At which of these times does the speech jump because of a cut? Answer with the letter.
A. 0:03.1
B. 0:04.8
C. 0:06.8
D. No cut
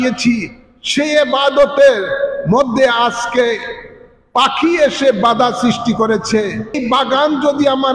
C